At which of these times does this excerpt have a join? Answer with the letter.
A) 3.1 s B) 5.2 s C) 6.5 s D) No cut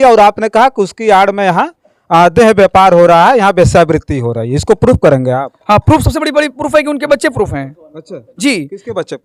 D